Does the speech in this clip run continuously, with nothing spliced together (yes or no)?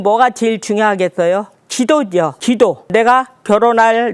no